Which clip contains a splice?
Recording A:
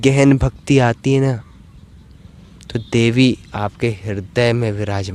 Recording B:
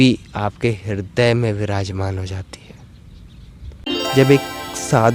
B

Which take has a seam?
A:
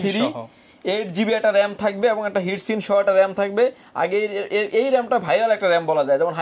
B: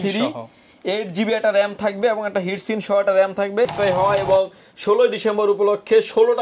B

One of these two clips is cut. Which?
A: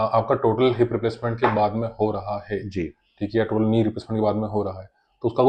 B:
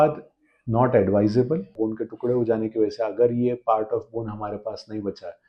B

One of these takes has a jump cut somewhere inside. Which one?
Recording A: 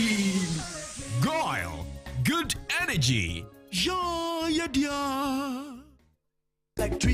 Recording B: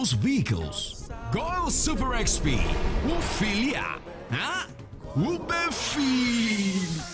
B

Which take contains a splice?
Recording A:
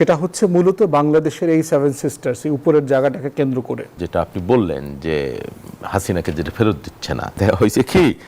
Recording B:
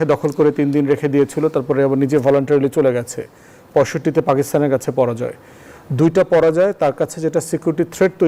A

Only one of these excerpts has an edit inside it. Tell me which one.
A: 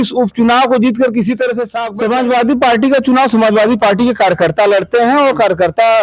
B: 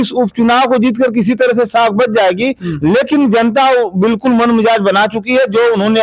A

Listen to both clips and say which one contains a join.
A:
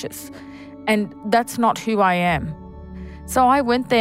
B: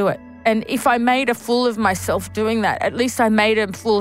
A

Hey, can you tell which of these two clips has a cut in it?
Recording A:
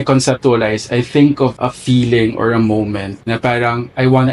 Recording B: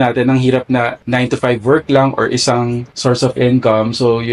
B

